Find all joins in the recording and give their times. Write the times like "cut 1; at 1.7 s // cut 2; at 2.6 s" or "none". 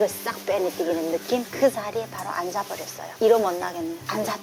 cut 1; at 1.5 s